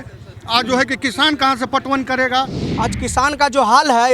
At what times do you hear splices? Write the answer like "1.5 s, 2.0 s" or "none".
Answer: 2.6 s